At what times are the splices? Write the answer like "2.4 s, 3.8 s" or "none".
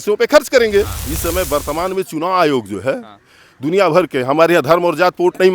1.0 s